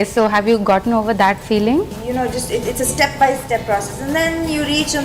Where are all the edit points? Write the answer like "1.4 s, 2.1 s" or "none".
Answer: 2.0 s